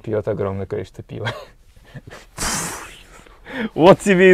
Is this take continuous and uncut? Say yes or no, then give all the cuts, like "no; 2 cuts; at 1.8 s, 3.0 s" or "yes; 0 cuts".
yes; 0 cuts